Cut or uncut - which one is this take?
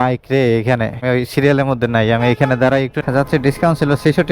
cut